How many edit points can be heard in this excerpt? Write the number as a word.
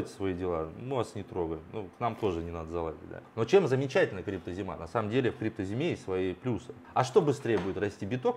two